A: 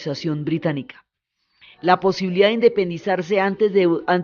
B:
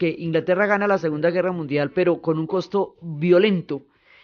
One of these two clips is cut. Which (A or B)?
A